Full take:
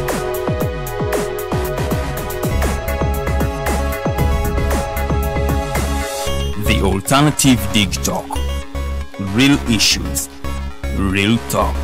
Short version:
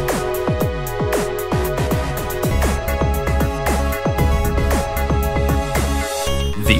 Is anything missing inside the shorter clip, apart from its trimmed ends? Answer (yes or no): no